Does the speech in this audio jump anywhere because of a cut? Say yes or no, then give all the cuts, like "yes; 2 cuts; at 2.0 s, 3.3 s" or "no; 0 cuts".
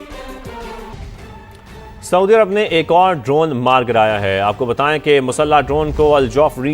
yes; 1 cut; at 0.9 s